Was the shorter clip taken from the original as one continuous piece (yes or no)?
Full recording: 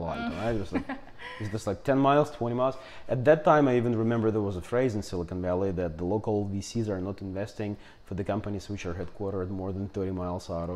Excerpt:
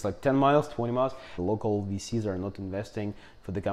no